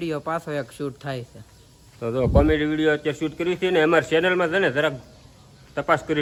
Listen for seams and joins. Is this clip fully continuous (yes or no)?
yes